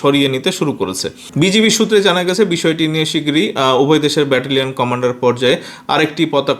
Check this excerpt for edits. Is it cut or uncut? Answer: uncut